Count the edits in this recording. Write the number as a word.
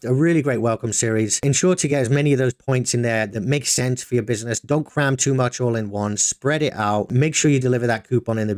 two